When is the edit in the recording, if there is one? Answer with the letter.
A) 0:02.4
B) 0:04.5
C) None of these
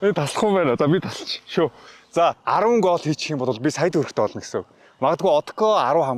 A